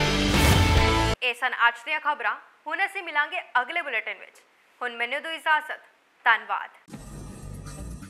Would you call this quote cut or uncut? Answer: uncut